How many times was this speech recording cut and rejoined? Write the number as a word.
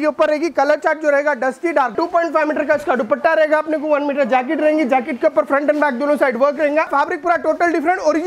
two